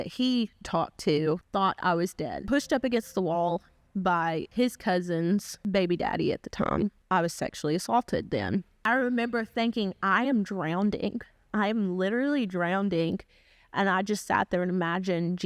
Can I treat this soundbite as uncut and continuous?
no; 6 cuts; at 1.4 s, 2.4 s, 4.5 s, 5.5 s, 6.8 s, 8.7 s

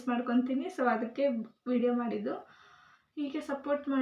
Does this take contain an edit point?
no; 0 cuts

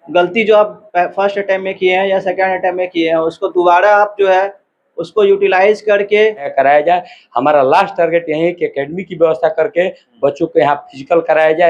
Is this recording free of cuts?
no; 1 cut; at 6.5 s

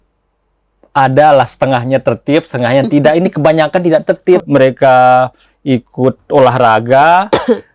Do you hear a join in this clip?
yes; 1 cut; at 4.4 s

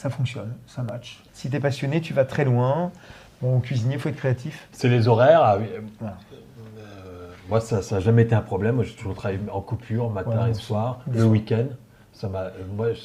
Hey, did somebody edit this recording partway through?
no; 0 cuts

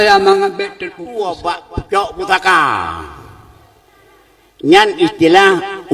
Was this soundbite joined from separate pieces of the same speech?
yes; 1 cut; at 1.4 s

